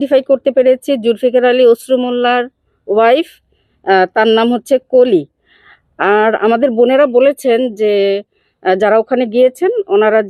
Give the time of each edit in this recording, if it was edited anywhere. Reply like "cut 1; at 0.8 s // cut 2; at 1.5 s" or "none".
none

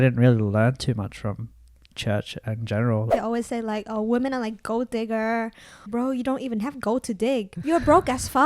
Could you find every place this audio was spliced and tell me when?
cut 1; at 3.1 s // cut 2; at 5.9 s // cut 3; at 7.5 s

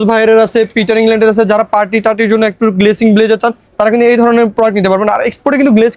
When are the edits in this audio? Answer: none

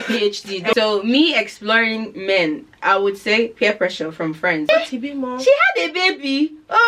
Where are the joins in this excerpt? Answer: cut 1; at 0.7 s // cut 2; at 4.7 s

